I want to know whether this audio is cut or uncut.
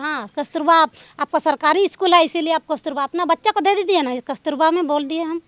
uncut